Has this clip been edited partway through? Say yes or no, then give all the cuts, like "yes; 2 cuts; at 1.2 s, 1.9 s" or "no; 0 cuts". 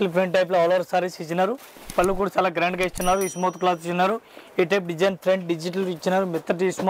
no; 0 cuts